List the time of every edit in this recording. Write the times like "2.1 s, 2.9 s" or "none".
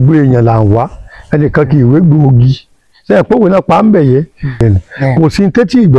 4.6 s